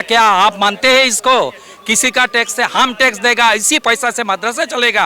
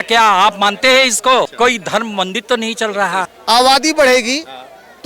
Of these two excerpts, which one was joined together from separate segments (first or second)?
second